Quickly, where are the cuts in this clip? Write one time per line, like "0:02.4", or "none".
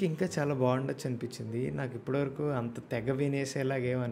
none

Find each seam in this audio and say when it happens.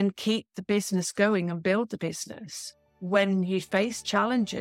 none

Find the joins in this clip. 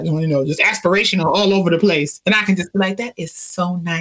0:02.1

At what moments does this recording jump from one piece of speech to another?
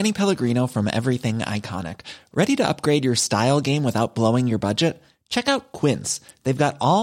none

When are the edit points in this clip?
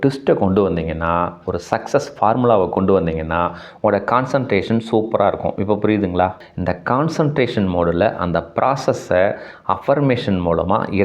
0:06.4

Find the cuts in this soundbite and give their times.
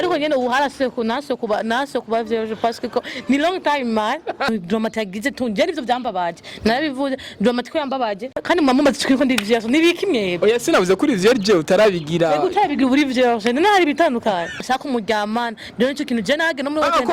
0:04.5
0:08.4
0:14.6

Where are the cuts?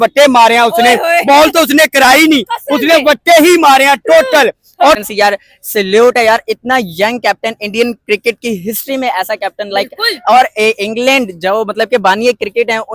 0:05.0

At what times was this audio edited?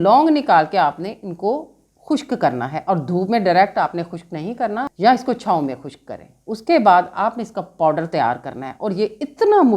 0:04.9

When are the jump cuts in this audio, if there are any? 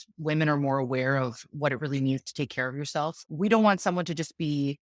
0:03.2

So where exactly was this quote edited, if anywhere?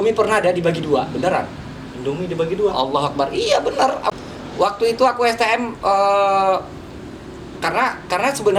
0:04.1

